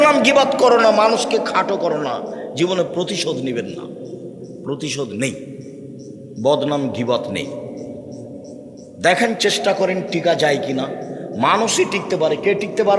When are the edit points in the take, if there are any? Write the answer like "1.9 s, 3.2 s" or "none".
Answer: none